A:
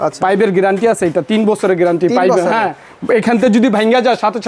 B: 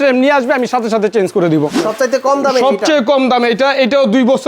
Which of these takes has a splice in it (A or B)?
B